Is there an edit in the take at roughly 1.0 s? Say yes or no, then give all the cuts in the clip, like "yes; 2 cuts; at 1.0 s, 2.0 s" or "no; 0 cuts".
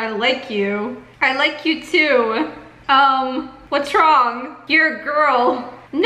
yes; 3 cuts; at 1.0 s, 2.7 s, 3.6 s